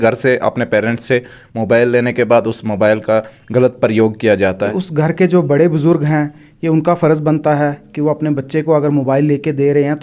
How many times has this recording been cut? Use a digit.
1